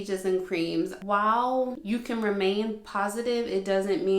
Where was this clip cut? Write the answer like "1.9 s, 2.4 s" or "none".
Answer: 1.0 s, 1.8 s